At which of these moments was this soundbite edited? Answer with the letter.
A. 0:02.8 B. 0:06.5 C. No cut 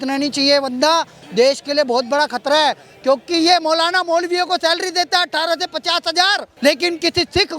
B